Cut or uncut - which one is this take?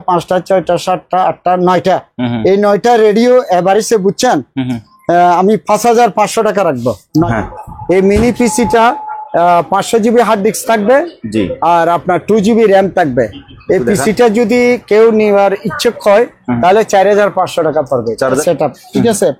cut